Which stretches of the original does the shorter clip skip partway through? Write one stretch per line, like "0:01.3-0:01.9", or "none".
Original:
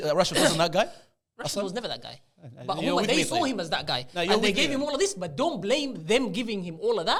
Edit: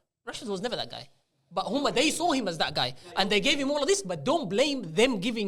none